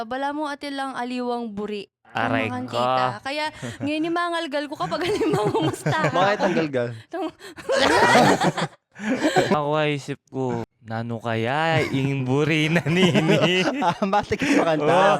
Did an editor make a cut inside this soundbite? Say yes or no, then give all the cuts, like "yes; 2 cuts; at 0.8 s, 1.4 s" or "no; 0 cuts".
yes; 2 cuts; at 9.5 s, 10.8 s